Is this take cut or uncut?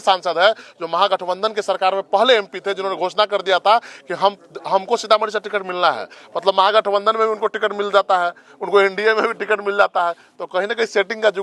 uncut